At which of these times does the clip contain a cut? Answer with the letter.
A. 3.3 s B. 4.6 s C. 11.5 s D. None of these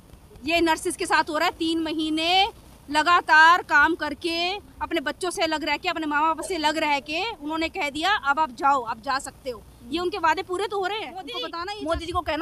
C